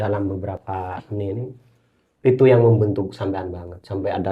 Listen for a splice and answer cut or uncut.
uncut